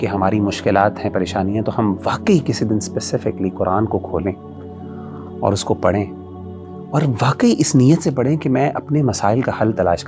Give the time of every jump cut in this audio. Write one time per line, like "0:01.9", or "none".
none